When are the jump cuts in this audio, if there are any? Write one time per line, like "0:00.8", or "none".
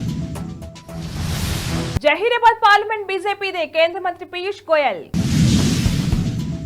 0:01.9